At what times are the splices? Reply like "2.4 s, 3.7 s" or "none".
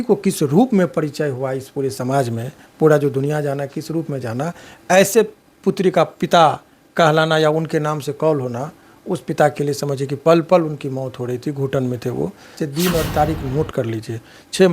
12.6 s